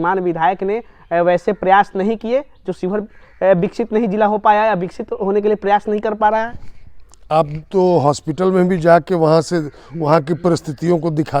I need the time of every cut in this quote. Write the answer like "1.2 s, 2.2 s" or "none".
none